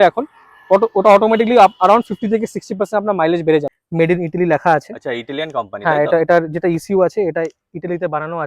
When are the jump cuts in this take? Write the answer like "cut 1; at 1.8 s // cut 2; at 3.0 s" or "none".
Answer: cut 1; at 3.7 s